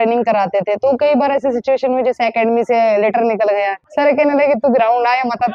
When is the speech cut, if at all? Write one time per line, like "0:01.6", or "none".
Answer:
0:03.8